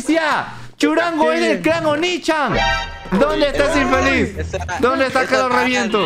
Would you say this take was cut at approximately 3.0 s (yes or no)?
yes